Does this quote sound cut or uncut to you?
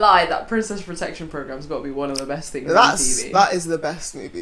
uncut